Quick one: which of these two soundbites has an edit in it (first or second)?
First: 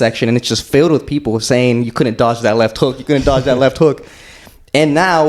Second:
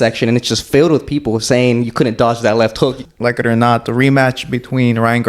second